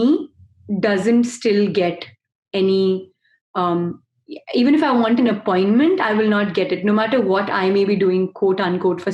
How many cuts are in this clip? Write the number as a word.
zero